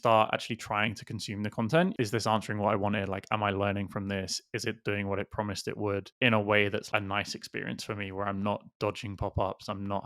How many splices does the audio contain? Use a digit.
2